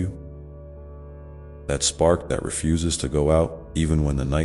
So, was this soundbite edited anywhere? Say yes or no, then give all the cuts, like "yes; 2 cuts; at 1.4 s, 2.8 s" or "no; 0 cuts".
no; 0 cuts